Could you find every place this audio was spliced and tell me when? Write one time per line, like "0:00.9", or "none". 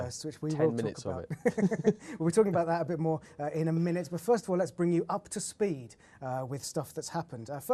0:04.7